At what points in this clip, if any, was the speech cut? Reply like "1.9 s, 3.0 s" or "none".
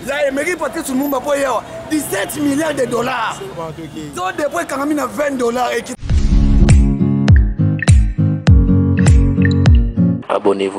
6.0 s